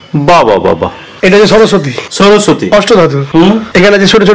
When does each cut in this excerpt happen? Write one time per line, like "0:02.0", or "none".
0:01.1